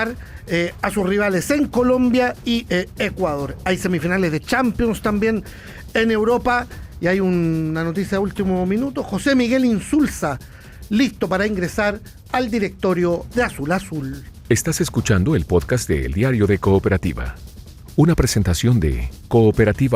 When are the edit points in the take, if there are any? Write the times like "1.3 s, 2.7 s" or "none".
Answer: 14.3 s